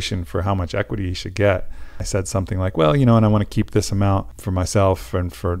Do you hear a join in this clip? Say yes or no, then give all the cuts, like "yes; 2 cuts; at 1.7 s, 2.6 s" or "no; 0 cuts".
yes; 2 cuts; at 2.0 s, 4.4 s